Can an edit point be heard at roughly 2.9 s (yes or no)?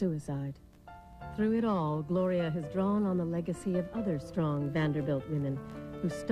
no